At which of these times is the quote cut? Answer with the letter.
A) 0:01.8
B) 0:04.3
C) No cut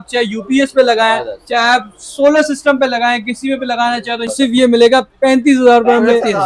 B